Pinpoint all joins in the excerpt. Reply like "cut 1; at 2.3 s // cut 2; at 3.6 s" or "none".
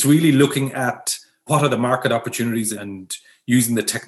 cut 1; at 1.4 s // cut 2; at 2.7 s